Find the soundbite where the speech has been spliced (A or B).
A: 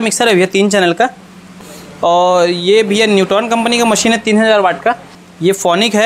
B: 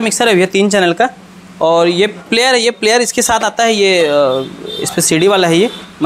A